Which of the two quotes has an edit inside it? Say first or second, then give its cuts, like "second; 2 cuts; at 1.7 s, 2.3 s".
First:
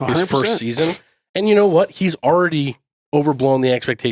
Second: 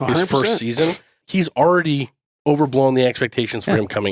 second; 1 cut; at 1.3 s